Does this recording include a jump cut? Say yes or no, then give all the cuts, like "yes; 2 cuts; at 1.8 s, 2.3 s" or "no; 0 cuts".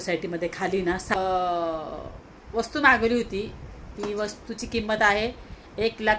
yes; 1 cut; at 1.1 s